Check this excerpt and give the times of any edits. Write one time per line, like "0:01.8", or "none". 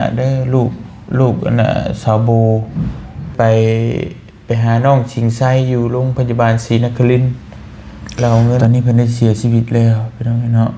0:03.3
0:08.6